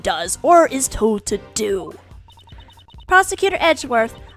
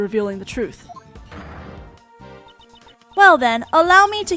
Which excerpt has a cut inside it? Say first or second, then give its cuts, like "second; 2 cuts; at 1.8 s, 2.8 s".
first; 1 cut; at 3.3 s